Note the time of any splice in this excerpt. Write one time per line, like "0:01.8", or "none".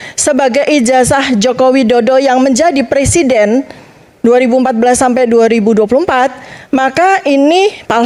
none